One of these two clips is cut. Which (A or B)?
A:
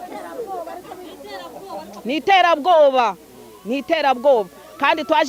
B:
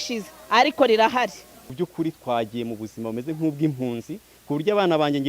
B